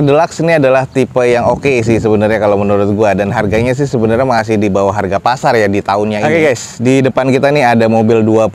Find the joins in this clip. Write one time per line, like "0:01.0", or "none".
0:06.2